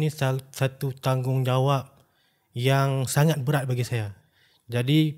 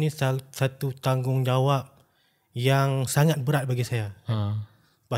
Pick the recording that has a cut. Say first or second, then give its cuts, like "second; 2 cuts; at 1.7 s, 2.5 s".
first; 1 cut; at 4.2 s